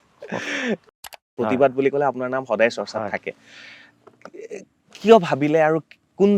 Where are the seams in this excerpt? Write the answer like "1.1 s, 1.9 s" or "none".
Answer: 1.1 s